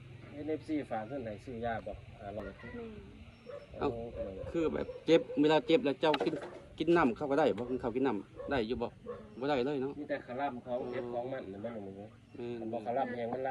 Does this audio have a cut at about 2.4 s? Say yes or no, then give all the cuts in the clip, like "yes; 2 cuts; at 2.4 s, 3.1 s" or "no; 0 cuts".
yes; 1 cut; at 2.4 s